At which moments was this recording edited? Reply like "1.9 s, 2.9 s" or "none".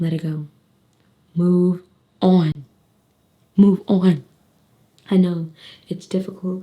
none